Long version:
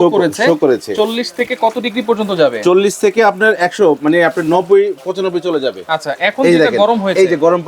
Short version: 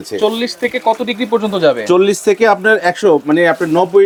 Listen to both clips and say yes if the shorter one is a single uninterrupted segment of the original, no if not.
yes